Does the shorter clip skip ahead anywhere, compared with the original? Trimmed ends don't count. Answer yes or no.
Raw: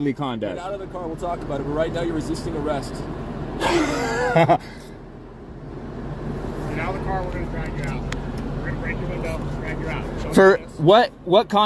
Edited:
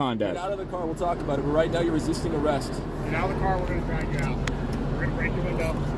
yes